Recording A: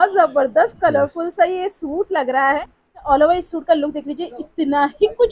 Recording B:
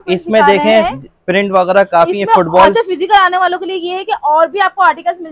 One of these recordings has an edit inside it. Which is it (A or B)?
A